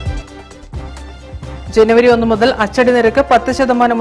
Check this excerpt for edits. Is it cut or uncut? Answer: cut